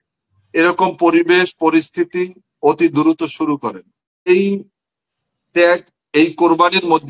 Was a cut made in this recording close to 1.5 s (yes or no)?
no